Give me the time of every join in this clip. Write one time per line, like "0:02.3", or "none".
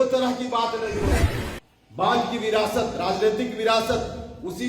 0:01.2